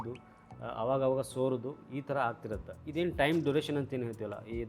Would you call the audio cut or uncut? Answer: uncut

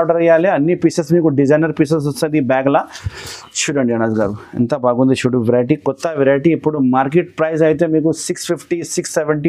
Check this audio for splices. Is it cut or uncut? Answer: uncut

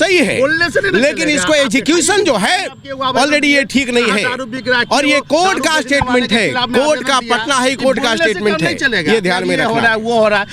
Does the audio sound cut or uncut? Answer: uncut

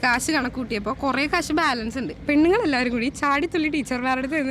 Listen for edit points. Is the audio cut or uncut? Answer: cut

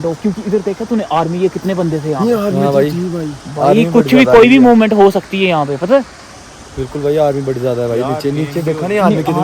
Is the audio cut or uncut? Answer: uncut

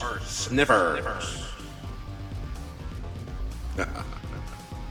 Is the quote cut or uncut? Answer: uncut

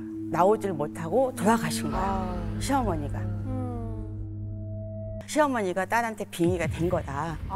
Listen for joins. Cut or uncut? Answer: cut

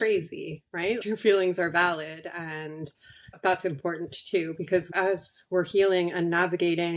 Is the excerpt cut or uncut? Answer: cut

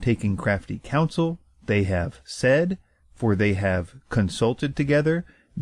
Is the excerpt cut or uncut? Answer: cut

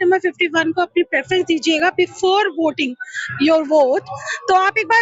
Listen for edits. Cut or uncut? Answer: uncut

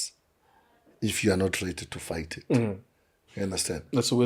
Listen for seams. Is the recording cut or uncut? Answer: uncut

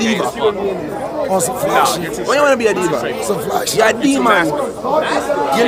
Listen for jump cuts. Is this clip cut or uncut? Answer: uncut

